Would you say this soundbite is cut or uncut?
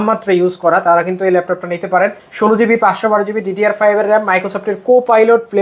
cut